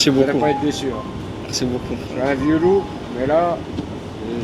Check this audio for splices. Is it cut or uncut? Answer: uncut